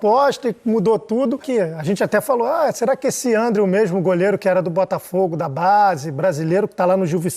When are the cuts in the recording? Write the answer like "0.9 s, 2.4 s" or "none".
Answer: 1.4 s